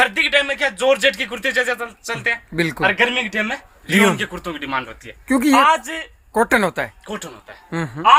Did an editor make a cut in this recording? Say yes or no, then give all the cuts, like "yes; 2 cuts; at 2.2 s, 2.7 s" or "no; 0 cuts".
no; 0 cuts